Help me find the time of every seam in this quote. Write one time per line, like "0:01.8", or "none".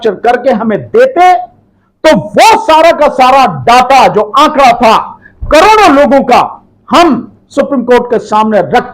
none